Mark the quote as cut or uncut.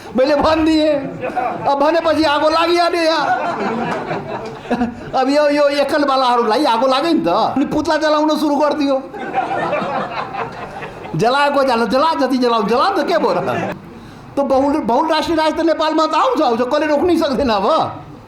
cut